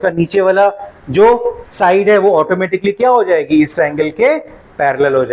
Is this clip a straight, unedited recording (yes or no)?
yes